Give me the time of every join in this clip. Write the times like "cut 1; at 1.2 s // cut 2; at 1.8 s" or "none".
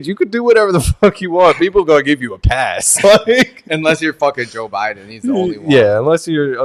none